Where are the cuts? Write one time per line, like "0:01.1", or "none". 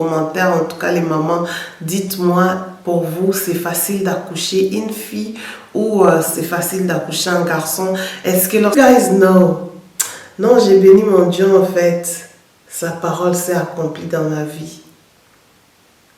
0:08.7